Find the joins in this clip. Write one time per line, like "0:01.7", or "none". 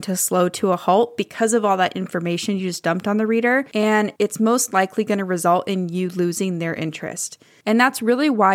0:04.0